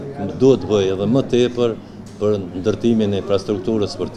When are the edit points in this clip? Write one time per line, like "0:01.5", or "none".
none